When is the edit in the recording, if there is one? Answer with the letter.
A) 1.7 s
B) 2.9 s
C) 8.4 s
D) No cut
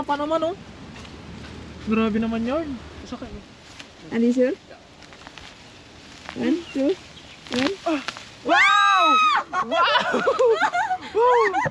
B